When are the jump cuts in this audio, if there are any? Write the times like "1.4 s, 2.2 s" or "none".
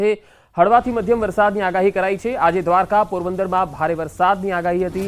none